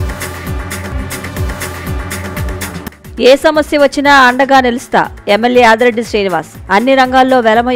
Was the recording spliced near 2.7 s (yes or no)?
yes